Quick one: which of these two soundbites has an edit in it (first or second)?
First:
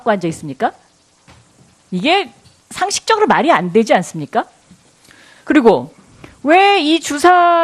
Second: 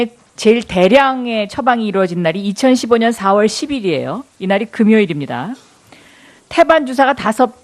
second